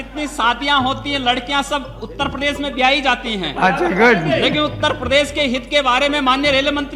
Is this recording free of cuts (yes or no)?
yes